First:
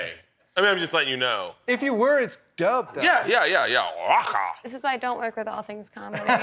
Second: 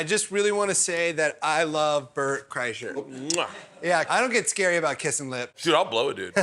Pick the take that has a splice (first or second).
second